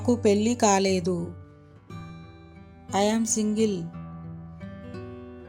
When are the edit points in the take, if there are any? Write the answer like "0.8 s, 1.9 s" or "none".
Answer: none